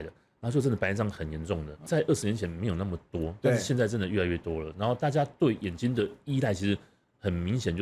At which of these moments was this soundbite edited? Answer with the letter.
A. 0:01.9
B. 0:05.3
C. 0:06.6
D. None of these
A